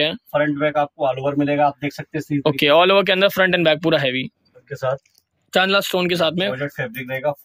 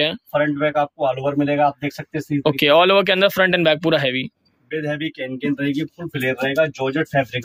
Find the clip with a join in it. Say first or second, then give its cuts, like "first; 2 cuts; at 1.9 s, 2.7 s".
first; 1 cut; at 4.6 s